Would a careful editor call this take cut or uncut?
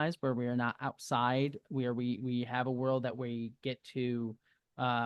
uncut